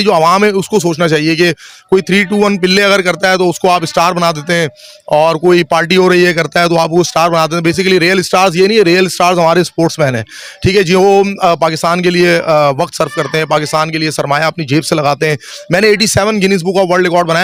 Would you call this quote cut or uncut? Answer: uncut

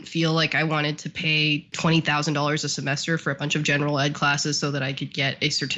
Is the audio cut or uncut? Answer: cut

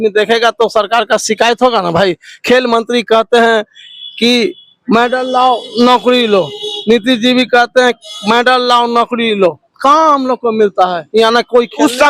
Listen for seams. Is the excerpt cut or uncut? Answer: uncut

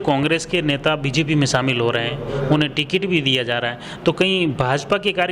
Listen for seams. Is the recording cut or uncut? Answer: uncut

